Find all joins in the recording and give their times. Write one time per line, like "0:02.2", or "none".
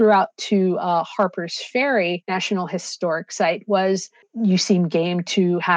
0:02.2
0:04.3